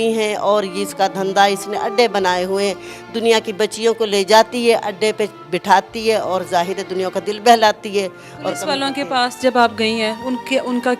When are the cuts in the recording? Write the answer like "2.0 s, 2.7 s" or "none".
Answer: none